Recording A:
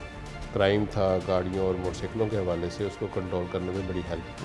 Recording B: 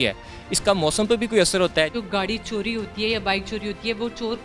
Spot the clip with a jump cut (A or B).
B